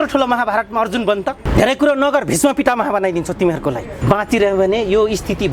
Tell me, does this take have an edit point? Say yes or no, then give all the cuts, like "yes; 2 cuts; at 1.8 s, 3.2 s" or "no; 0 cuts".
yes; 1 cut; at 3.9 s